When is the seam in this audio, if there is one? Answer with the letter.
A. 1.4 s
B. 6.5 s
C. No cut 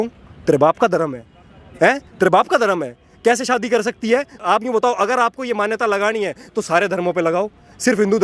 C